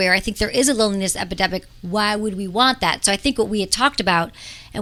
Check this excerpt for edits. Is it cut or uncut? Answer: uncut